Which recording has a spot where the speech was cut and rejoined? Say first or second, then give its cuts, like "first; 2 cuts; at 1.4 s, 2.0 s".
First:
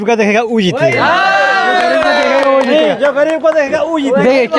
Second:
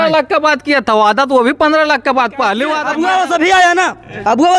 second; 1 cut; at 2.9 s